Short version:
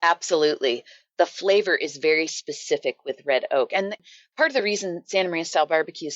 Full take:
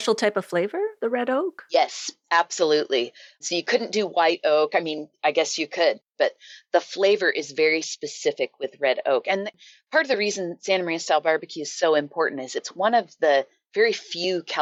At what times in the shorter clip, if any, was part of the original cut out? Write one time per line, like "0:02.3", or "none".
0:01.0

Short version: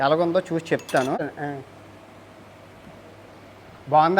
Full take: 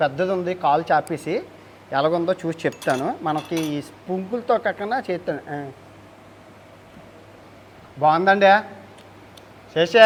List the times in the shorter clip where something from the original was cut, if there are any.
0:01.2

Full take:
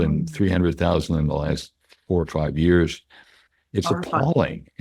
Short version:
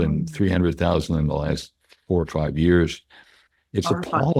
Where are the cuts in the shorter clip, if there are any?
none

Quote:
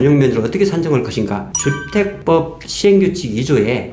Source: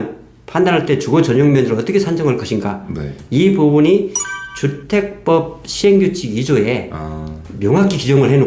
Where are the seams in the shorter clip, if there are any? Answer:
0:02.0

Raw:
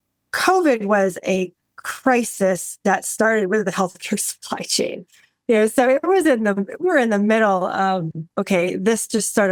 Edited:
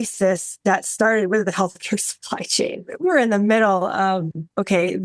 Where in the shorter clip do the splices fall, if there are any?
0:02.9

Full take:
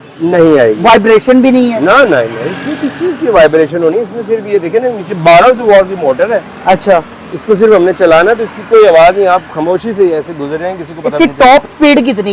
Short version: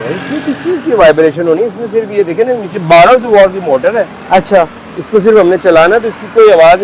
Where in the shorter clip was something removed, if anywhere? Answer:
none

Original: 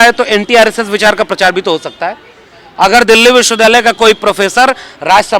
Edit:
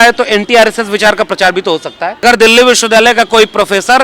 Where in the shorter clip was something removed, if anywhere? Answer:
0:02.2

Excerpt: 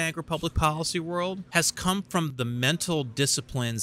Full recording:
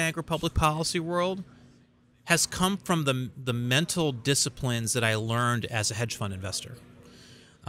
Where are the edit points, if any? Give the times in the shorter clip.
0:01.4
0:02.3

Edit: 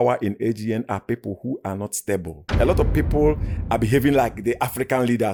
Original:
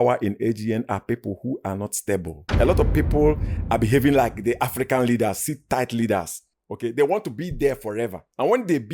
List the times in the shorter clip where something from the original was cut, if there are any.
none

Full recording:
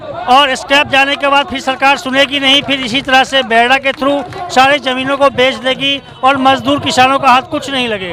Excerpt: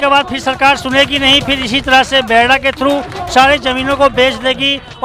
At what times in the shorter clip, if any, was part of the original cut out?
none

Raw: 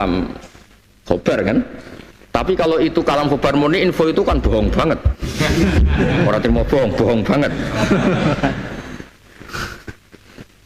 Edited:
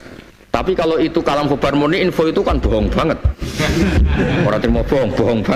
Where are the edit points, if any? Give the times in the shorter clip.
none

